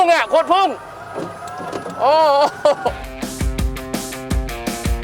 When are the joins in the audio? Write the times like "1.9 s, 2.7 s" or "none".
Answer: none